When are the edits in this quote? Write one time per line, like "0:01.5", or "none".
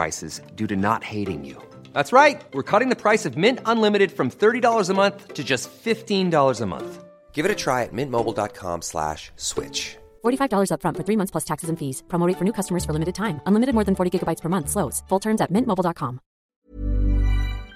0:16.7